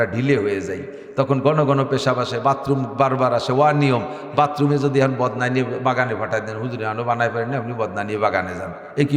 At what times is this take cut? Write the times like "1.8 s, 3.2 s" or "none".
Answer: none